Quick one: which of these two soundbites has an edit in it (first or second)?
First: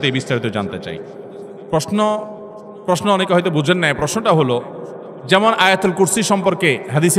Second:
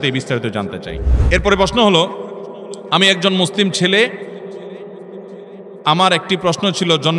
second